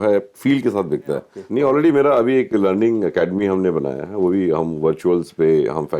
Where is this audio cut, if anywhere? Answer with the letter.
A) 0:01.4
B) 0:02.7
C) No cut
A